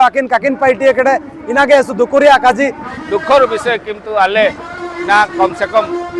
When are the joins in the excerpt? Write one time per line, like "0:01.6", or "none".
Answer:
0:02.8